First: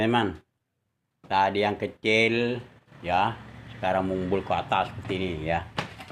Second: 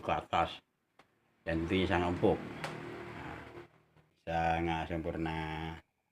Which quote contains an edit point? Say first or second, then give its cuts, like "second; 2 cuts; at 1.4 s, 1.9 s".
second; 1 cut; at 4.1 s